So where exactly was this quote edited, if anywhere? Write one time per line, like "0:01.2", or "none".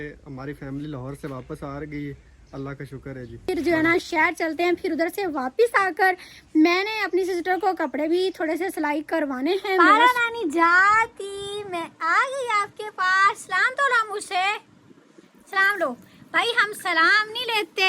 0:03.5
0:09.9